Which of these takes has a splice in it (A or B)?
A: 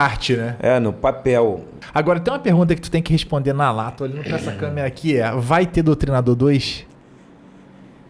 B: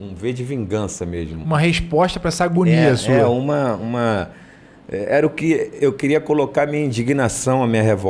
A